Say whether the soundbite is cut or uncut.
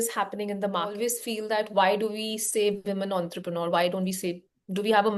cut